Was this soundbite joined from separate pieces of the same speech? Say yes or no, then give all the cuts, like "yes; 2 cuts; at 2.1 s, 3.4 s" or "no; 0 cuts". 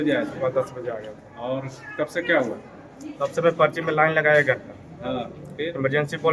no; 0 cuts